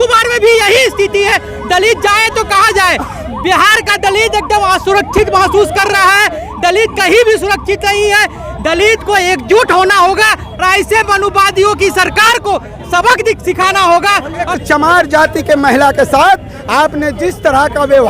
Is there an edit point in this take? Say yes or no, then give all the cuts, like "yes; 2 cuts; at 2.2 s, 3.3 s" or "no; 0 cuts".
yes; 1 cut; at 14.5 s